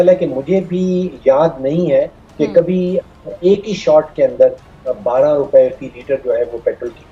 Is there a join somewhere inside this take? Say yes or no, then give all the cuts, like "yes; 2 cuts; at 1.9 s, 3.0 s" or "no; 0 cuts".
no; 0 cuts